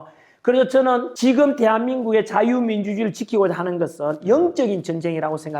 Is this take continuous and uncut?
no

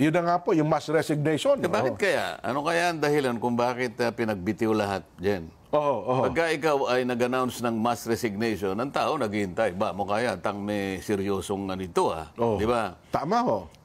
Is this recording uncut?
no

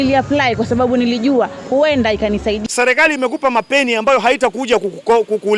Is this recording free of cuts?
no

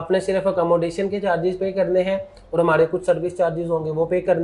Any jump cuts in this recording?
no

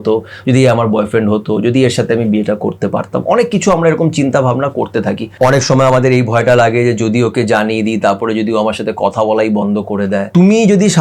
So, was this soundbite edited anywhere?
yes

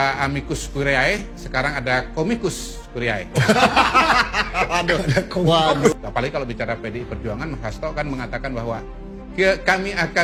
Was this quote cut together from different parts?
no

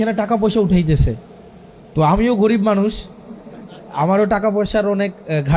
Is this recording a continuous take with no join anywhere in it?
yes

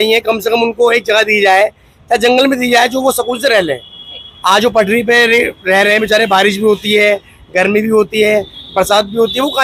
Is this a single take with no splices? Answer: yes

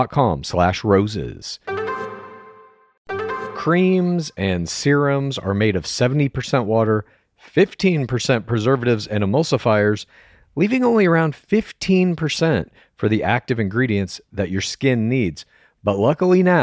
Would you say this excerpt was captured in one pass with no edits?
no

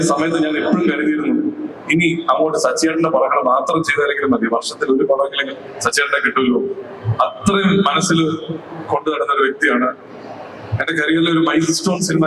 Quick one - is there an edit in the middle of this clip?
no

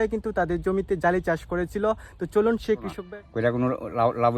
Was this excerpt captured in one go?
no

